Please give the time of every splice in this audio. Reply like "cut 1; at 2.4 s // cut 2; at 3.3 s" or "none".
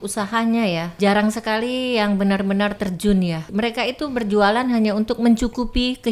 cut 1; at 0.9 s // cut 2; at 3.4 s